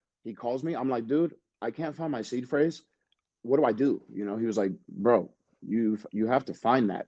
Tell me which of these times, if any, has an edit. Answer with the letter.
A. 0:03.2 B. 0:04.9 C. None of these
A